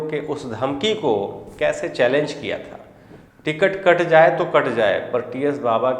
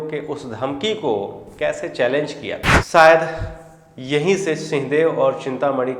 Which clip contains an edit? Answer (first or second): second